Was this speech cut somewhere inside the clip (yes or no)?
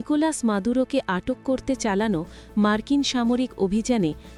no